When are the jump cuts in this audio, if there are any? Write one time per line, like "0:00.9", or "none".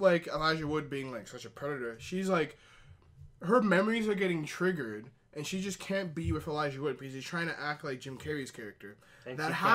0:06.3

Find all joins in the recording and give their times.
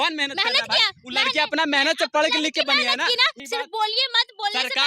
0:03.4

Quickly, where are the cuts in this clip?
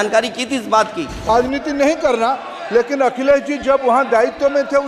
0:01.3

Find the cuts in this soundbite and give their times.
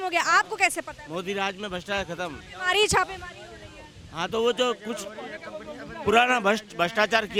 none

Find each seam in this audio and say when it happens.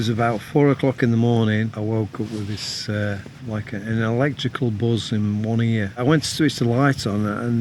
0:01.7
0:03.4
0:06.0

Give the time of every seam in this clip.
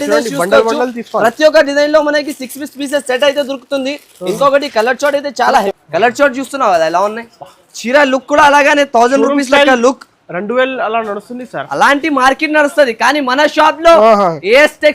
0:05.7

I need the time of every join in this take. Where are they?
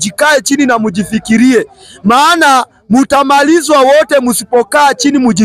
none

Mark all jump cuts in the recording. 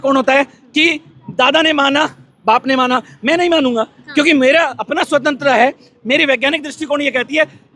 none

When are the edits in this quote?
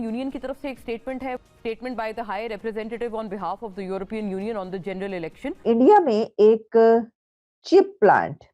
0:01.4
0:05.6

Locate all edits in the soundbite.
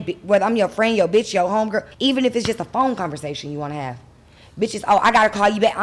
0:01.9

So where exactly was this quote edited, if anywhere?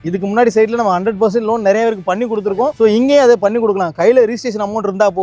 none

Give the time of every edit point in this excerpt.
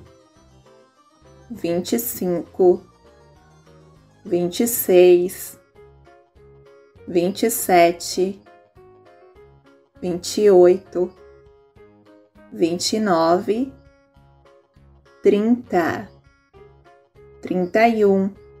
none

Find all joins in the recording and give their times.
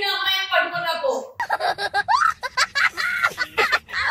0:01.2

